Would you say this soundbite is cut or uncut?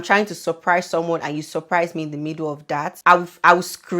cut